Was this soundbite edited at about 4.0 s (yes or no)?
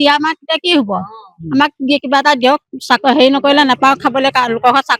no